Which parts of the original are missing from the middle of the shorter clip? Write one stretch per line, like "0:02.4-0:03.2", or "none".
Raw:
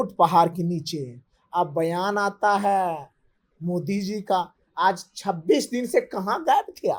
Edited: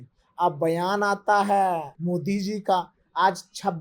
0:03.1-0:03.5